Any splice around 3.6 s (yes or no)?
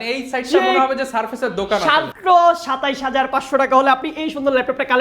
no